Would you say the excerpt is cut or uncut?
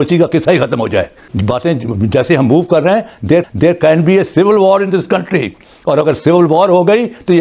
cut